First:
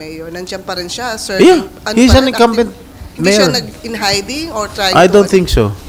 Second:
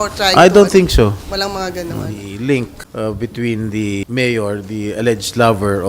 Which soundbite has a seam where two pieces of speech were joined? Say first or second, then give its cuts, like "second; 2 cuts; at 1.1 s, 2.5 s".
second; 3 cuts; at 2.2 s, 2.8 s, 4.0 s